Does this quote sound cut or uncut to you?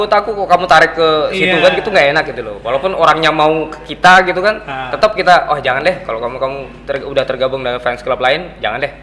uncut